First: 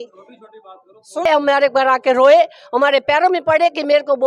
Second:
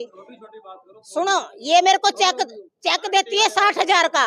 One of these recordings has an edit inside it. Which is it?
first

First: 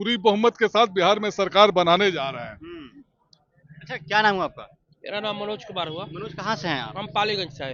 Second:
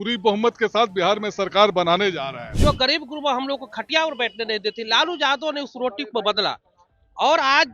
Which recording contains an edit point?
second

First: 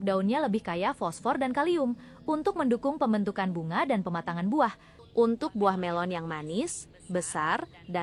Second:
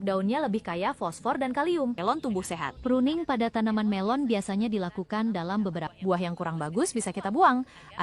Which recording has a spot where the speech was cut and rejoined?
second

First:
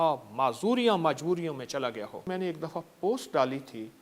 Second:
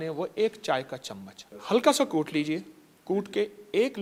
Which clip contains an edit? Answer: first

